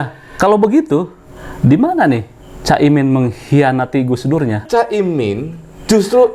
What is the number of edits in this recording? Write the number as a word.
one